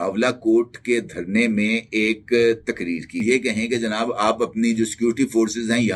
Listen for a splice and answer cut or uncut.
cut